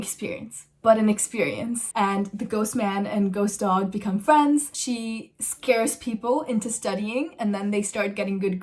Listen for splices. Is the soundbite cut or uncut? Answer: cut